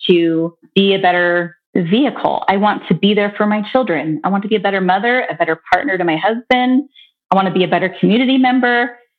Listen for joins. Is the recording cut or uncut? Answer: cut